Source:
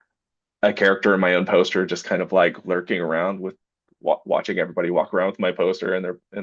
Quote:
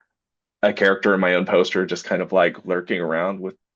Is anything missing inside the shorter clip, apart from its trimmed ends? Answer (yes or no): no